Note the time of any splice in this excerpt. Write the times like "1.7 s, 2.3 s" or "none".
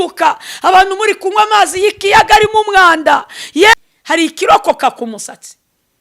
3.7 s